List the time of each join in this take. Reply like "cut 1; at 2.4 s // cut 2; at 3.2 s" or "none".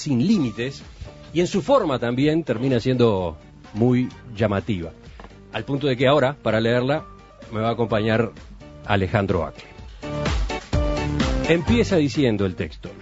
cut 1; at 8.3 s